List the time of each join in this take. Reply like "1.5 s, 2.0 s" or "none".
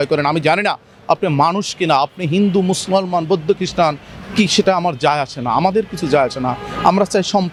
none